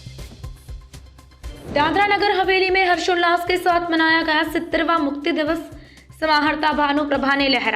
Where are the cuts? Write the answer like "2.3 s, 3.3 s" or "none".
1.6 s